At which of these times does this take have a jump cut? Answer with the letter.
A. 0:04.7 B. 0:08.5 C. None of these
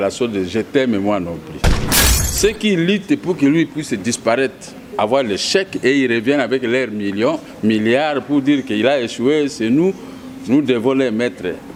C